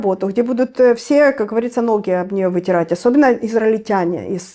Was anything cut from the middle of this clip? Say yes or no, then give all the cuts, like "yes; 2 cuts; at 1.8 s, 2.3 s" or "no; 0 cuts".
no; 0 cuts